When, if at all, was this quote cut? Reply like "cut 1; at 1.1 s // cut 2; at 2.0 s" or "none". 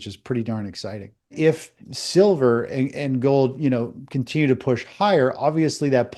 cut 1; at 1.4 s